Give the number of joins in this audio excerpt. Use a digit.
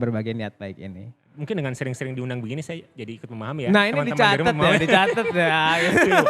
1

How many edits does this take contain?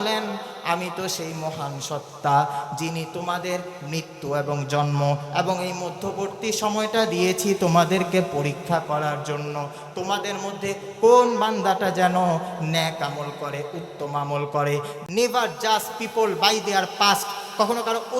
1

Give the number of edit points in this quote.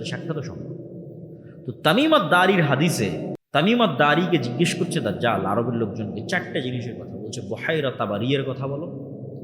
1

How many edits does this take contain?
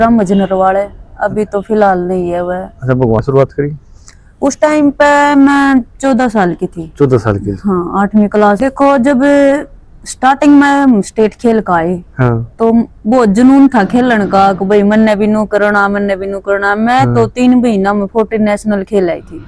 2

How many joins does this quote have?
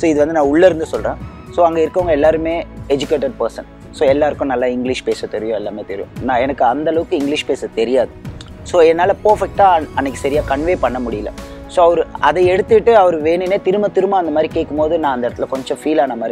0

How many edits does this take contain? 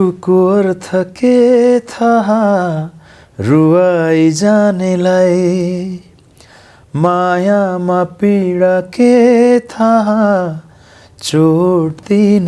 0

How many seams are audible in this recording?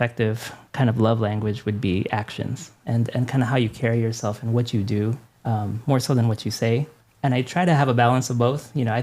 2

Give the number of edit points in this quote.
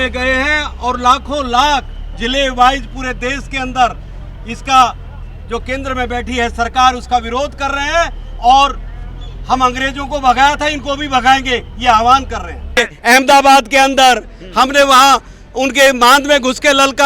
1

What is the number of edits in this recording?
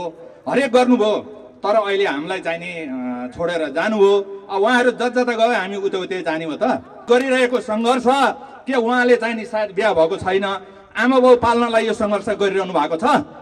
1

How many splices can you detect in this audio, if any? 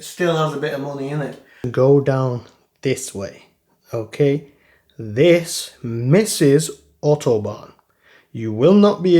1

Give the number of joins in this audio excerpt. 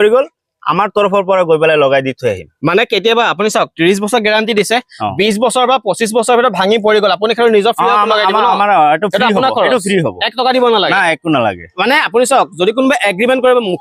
0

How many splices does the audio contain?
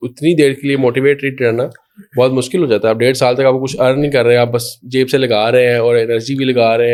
0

